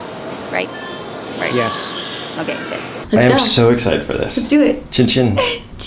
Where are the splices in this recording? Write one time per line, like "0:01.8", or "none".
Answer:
0:03.1